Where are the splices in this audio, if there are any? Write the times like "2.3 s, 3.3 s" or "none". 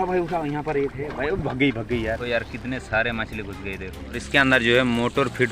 2.2 s, 4.2 s

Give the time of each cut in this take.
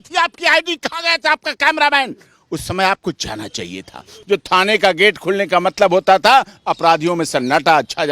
4.1 s

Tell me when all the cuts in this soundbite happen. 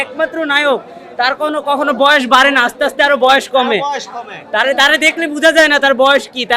none

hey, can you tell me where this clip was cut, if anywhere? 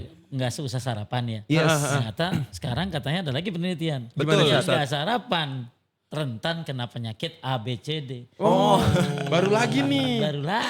none

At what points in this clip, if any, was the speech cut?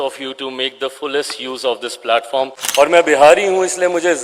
2.6 s

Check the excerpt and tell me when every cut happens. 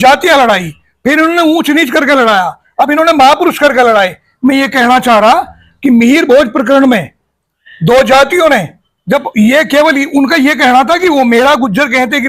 none

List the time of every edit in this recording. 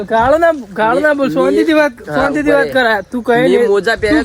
none

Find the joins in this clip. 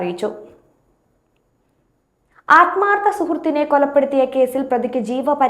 1.5 s

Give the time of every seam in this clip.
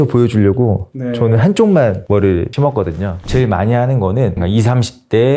3.2 s, 4.4 s

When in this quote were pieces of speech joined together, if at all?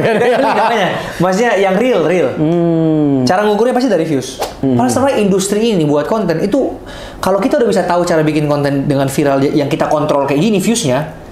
4.6 s

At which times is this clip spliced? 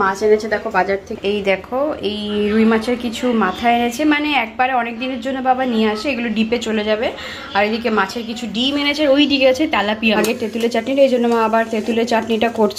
10.2 s

